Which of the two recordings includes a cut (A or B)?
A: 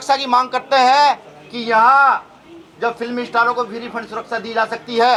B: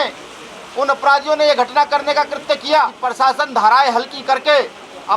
B